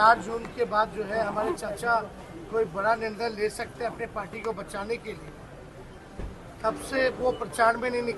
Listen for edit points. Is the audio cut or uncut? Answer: uncut